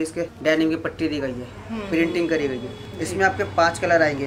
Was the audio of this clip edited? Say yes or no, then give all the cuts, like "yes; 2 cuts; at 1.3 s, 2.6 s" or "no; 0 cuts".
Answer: no; 0 cuts